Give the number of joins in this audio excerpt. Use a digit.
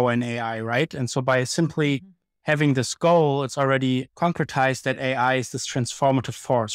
1